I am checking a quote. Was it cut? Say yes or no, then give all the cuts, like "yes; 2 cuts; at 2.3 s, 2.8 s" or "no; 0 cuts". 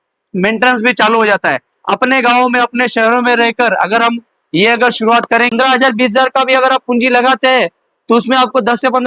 yes; 1 cut; at 5.5 s